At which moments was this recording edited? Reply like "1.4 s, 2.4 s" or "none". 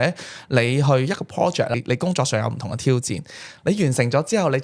1.7 s